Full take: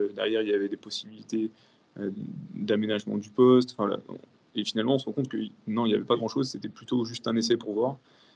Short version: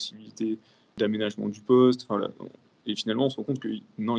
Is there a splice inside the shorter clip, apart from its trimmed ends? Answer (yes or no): yes